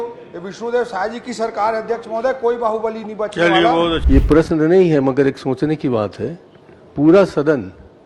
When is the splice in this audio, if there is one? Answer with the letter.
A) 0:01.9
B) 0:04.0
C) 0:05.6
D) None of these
B